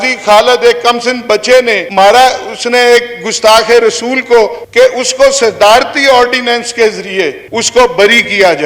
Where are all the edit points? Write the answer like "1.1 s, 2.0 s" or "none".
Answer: none